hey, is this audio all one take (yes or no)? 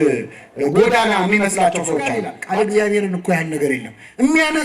no